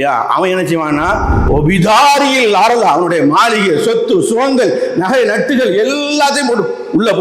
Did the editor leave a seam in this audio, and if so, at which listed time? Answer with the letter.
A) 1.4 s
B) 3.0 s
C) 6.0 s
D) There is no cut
A